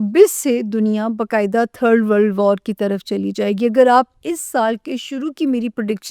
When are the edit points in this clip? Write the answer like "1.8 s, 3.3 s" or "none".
none